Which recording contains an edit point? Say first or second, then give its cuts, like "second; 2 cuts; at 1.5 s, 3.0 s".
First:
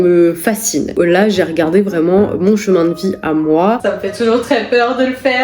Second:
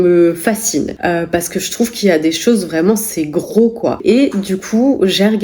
first; 2 cuts; at 1.0 s, 3.8 s